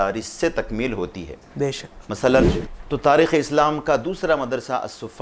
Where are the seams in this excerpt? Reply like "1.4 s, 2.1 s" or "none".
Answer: 2.7 s